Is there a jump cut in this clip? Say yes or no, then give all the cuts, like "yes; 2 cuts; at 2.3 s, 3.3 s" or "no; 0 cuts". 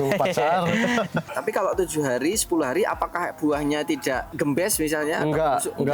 yes; 1 cut; at 1.3 s